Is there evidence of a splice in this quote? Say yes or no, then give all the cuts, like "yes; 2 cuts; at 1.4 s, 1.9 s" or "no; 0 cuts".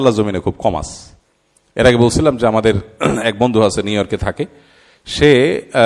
yes; 1 cut; at 1.8 s